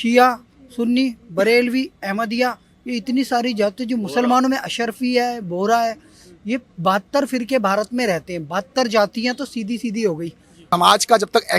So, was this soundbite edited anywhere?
yes; 1 cut; at 10.6 s

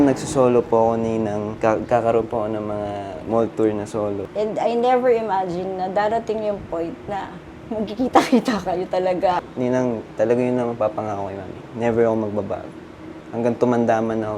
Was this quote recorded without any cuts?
no; 2 cuts; at 4.2 s, 9.4 s

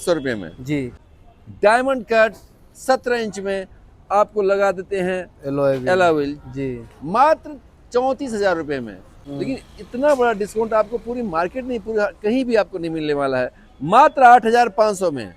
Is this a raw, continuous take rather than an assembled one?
no; 2 cuts; at 0.9 s, 9.2 s

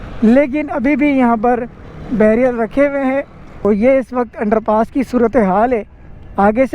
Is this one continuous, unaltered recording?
no; 1 cut; at 3.6 s

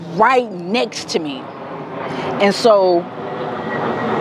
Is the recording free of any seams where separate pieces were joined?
yes; 0 cuts

